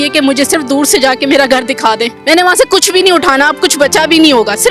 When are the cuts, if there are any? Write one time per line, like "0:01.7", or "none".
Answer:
0:02.1